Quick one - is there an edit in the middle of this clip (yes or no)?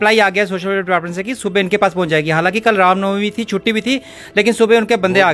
no